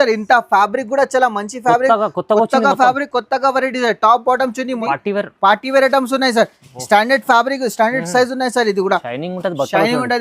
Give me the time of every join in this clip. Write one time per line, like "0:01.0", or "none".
0:04.8

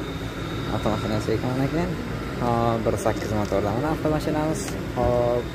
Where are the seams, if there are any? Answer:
none

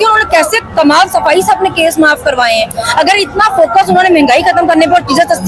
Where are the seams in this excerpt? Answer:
none

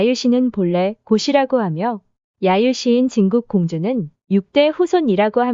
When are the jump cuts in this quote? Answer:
0:04.1

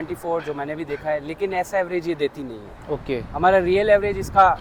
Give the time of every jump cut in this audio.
none

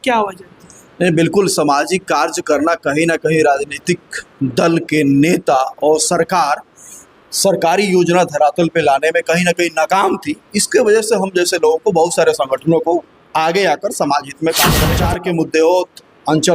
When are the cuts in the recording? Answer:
0:14.9

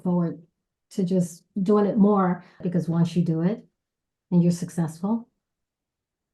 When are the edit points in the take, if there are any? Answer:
0:02.6

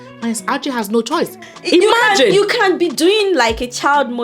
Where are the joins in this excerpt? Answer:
0:01.5

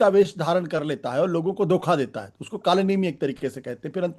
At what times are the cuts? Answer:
none

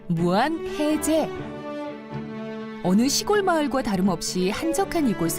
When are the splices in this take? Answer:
0:03.6

